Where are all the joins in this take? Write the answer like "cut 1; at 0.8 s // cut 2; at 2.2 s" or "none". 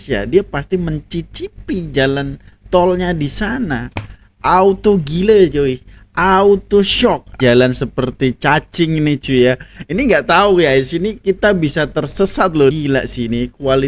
cut 1; at 7.3 s // cut 2; at 12.7 s